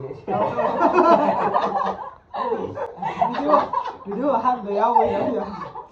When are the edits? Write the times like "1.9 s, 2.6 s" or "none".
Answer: none

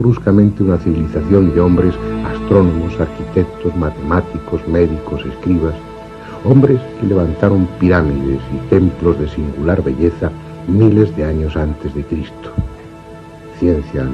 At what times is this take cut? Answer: none

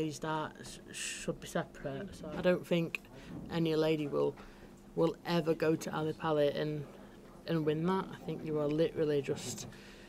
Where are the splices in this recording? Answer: 2.2 s

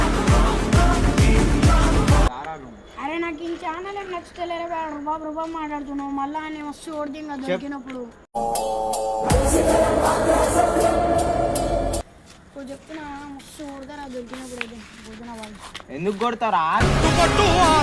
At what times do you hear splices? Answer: 2.3 s, 12.0 s

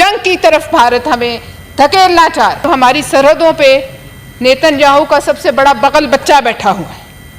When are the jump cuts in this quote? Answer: 2.6 s

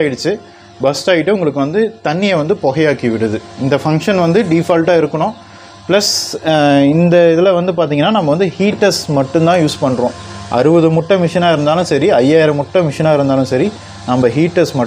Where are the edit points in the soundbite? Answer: none

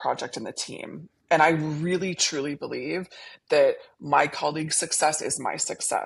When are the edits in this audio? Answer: none

